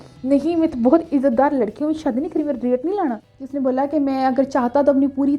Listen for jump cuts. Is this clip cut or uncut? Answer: cut